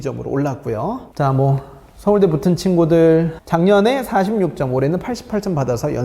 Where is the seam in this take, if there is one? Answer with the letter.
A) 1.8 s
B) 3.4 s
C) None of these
B